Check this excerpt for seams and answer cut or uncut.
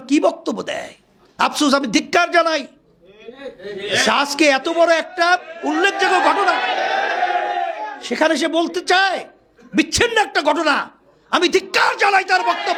uncut